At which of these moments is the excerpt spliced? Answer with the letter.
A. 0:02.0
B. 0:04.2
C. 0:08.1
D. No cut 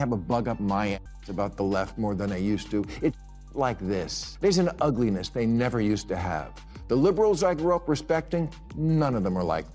B